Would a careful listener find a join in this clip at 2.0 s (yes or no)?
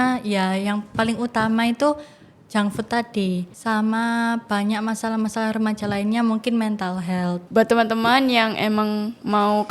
no